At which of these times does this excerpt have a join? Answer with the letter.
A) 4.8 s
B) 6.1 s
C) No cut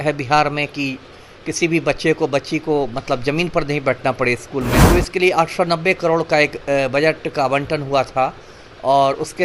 A